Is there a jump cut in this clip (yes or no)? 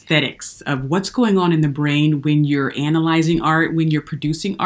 no